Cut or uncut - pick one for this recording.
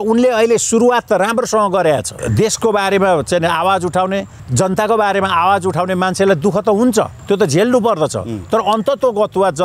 cut